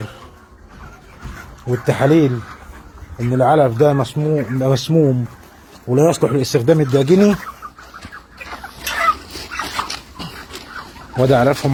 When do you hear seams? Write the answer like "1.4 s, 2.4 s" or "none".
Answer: none